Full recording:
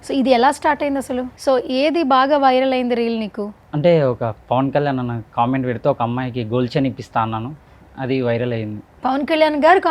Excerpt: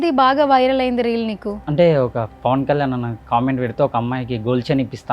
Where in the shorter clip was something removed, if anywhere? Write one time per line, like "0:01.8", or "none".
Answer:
0:01.6